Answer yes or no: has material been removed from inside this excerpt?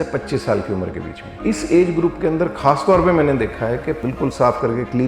yes